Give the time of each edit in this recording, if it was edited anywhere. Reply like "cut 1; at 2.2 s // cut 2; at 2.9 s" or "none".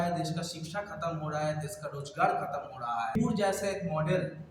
cut 1; at 3.2 s